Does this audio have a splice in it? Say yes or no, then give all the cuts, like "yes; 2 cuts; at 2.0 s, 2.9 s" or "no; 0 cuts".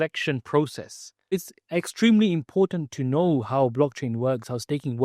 yes; 1 cut; at 1.4 s